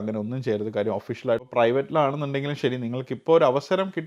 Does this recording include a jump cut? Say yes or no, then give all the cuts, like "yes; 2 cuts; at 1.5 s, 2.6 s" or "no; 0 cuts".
yes; 1 cut; at 1.4 s